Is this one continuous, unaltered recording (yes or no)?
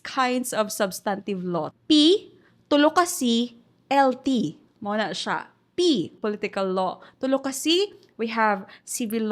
no